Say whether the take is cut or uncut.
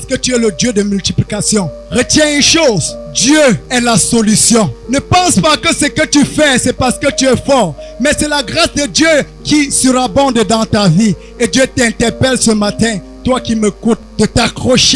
cut